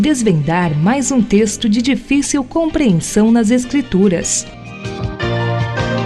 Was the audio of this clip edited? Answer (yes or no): yes